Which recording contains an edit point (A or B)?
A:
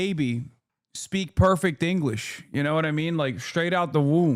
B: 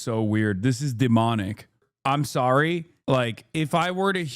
B